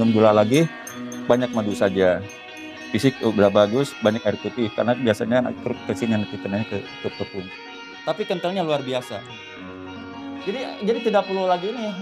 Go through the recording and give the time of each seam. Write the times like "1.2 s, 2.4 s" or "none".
7.5 s